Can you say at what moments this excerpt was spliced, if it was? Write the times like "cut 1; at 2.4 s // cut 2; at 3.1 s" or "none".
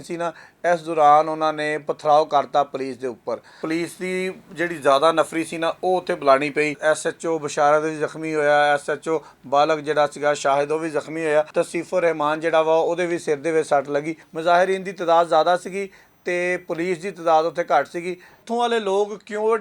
cut 1; at 3.6 s // cut 2; at 6.8 s // cut 3; at 11.5 s // cut 4; at 14.2 s // cut 5; at 18.4 s